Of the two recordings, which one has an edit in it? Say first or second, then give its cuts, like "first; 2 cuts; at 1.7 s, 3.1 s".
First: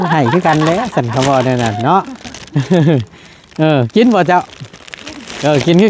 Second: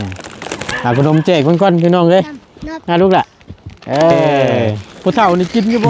second; 1 cut; at 4.5 s